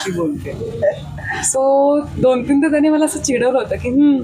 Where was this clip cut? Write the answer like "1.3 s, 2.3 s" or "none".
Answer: none